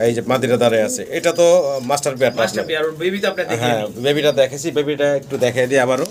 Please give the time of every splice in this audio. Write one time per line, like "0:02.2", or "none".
none